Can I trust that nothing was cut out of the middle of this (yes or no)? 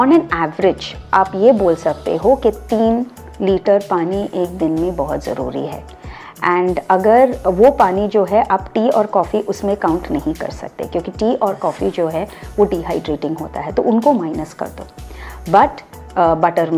yes